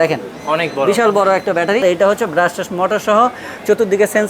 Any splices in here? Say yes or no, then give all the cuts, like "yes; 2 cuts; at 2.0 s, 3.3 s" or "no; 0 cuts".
yes; 1 cut; at 1.8 s